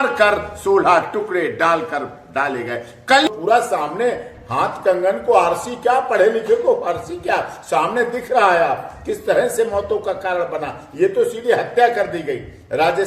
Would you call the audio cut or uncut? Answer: cut